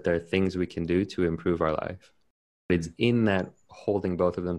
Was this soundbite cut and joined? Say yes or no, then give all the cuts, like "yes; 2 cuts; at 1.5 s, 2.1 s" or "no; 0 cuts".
yes; 1 cut; at 2.7 s